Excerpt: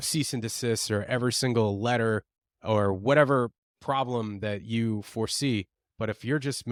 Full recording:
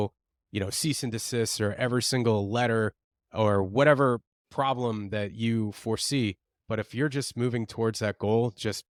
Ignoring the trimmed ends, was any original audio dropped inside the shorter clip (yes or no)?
no